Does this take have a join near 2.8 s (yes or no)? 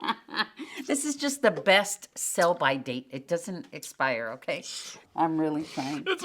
no